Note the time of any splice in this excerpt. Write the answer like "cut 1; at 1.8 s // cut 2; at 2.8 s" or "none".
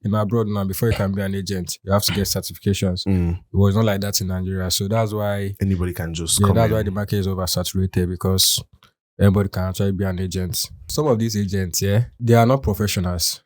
cut 1; at 10.9 s // cut 2; at 12.1 s